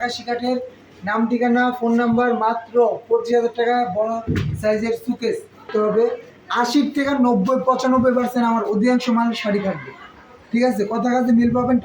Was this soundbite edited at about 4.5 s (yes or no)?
no